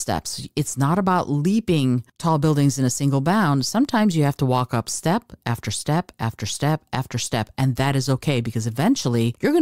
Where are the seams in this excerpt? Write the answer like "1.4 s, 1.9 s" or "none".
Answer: none